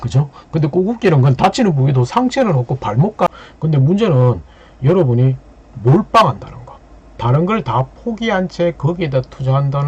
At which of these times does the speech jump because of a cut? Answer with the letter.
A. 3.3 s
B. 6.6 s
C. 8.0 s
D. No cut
A